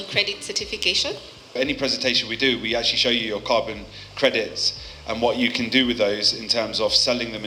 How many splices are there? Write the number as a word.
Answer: zero